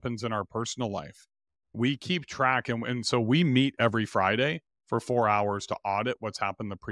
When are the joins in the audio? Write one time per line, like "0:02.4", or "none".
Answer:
none